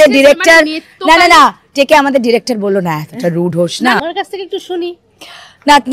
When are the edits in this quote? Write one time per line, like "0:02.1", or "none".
0:04.0